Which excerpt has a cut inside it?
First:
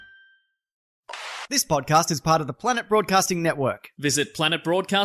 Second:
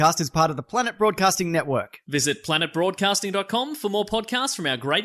first; 1 cut; at 1.0 s

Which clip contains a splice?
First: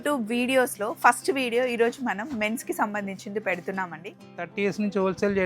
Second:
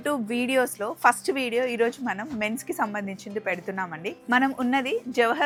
first; 1 cut; at 4.2 s

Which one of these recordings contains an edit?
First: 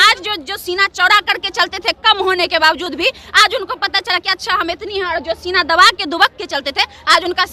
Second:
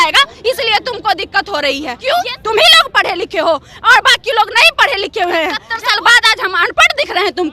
second; 2 cuts; at 1.9 s, 5.7 s

